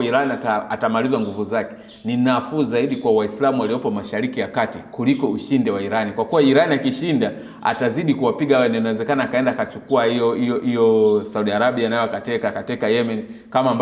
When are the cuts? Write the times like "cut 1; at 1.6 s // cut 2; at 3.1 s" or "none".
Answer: none